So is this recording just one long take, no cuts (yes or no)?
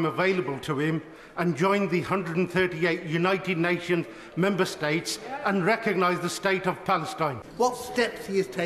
no